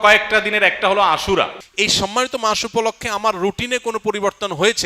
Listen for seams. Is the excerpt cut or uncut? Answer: cut